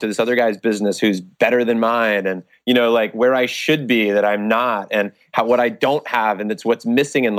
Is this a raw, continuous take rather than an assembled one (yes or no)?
yes